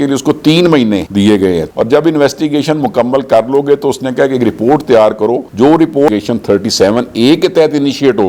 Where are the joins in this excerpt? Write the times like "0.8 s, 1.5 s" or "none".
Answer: 1.7 s, 6.1 s